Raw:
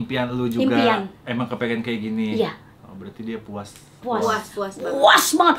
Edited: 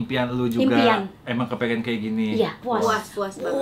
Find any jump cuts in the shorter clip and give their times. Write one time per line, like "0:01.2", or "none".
0:02.6